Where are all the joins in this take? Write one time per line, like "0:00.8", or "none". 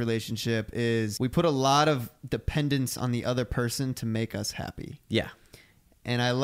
0:01.1